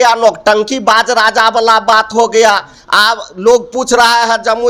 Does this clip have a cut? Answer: no; 0 cuts

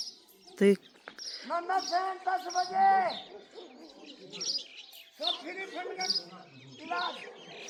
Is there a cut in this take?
no; 0 cuts

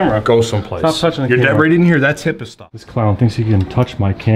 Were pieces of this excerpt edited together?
yes; 1 cut; at 3.1 s

